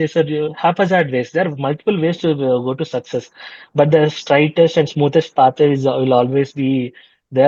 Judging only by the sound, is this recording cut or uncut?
uncut